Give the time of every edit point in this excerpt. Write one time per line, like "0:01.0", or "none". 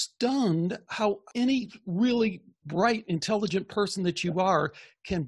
0:01.3